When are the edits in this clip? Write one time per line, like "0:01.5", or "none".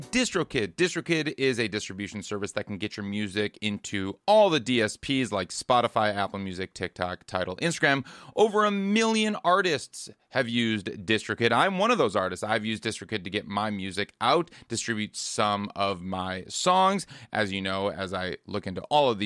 none